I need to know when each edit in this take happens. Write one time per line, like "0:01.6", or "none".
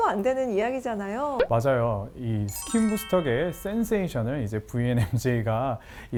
none

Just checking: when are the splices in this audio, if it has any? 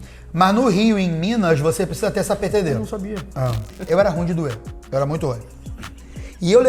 0:03.7

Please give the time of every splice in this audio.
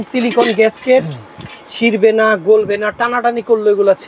none

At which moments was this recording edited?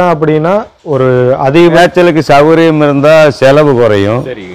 0:01.7

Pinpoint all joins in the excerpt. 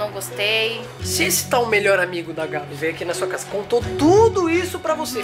0:01.0
0:02.7

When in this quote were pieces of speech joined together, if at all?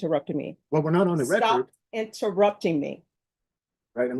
none

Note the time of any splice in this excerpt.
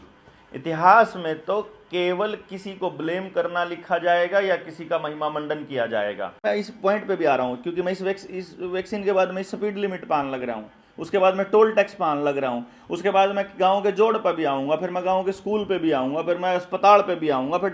0:06.4

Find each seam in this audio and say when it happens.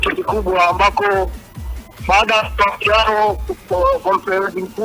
none

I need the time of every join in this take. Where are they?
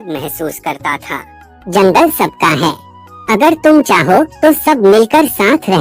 0:01.5

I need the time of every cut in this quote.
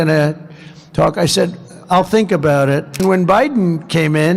0:03.0

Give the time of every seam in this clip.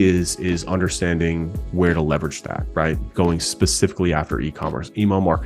none

